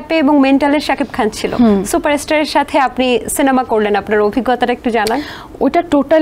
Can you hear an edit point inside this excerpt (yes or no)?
no